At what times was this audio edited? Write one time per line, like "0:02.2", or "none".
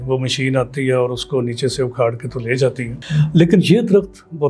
0:02.9